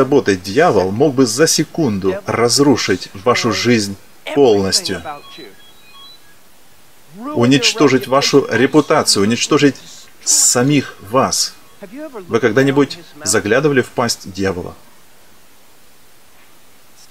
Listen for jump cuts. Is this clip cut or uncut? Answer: uncut